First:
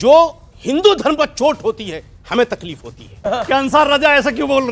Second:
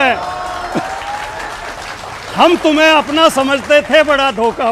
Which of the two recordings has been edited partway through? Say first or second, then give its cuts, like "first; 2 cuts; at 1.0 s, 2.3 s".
first; 1 cut; at 3.2 s